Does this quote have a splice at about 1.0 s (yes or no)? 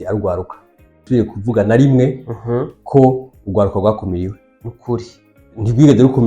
yes